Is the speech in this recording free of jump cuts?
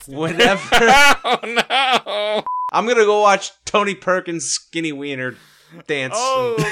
no; 1 cut; at 2.6 s

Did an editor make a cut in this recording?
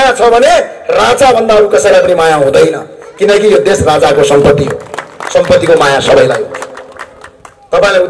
no; 0 cuts

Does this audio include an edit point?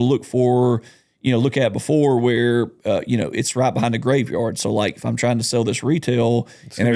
no; 0 cuts

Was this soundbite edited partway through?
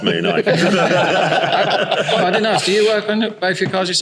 no; 0 cuts

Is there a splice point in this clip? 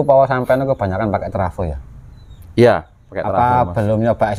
no; 0 cuts

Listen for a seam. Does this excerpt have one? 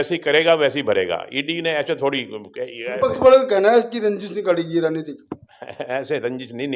no; 0 cuts

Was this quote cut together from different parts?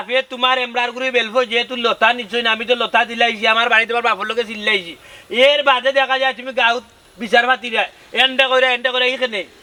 no; 0 cuts

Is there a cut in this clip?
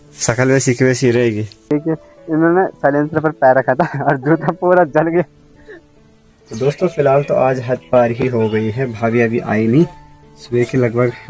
yes; 2 cuts; at 1.7 s, 5.7 s

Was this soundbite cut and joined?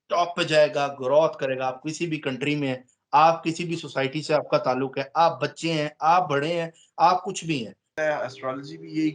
yes; 1 cut; at 7.9 s

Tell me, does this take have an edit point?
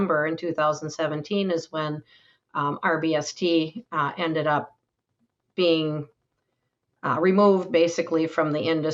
no; 0 cuts

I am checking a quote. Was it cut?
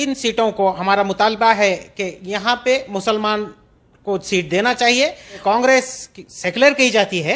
yes; 1 cut; at 5.4 s

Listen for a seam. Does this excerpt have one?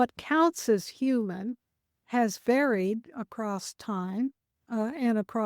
yes; 2 cuts; at 2.0 s, 4.5 s

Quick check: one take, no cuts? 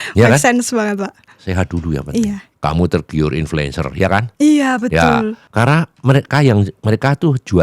no; 2 cuts; at 2.5 s, 5.4 s

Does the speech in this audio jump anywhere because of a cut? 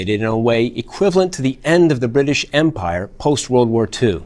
yes; 1 cut; at 1.6 s

